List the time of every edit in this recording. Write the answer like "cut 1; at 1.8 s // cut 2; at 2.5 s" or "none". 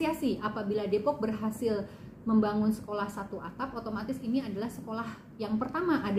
none